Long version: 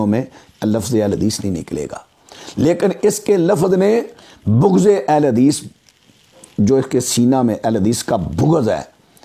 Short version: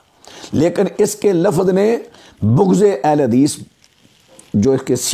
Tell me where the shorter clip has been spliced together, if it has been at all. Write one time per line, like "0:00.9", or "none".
none